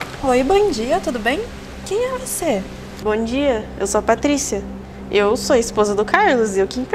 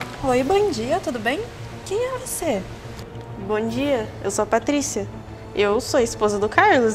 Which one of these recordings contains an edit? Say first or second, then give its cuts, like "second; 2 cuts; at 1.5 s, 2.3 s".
first; 1 cut; at 2.8 s